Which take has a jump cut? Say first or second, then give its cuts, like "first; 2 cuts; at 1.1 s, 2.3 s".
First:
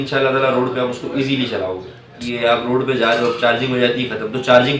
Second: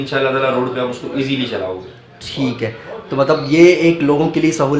first; 1 cut; at 2.2 s